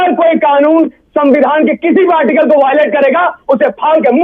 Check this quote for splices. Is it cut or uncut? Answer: uncut